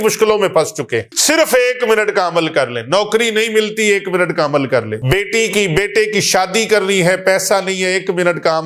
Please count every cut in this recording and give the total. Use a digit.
2